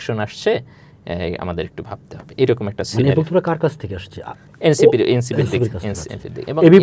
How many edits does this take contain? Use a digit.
0